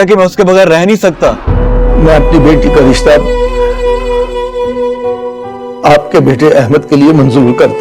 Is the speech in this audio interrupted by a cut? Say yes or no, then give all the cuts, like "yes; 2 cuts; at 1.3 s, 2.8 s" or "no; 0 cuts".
yes; 1 cut; at 1.4 s